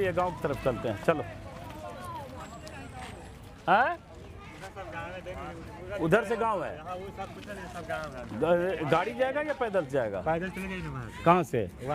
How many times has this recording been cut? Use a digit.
0